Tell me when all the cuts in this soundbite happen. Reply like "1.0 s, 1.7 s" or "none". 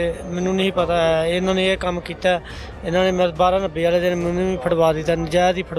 none